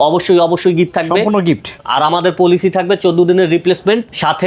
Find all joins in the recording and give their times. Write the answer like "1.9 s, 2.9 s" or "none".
1.7 s

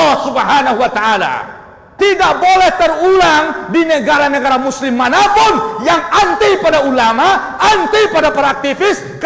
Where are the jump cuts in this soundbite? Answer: 1.9 s

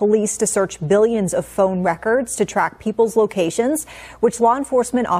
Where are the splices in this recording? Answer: none

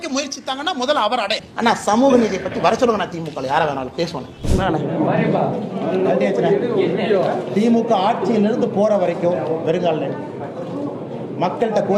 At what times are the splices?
1.4 s, 4.4 s

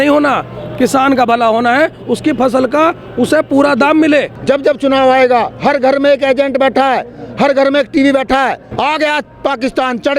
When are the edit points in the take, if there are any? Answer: 4.3 s, 8.7 s

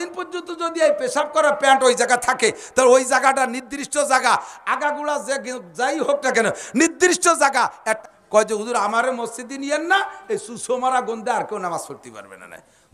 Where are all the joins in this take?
8.1 s

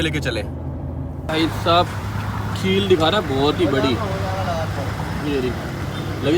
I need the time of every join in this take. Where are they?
1.3 s

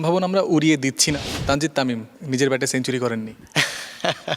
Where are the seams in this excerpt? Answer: 1.1 s, 2.1 s, 3.4 s

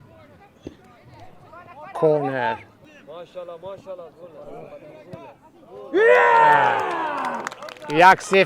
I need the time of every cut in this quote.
2.8 s

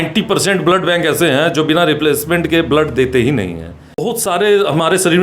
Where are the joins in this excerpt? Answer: 4.0 s

